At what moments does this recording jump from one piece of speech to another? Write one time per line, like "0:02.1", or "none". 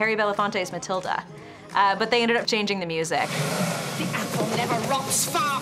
0:01.6
0:03.6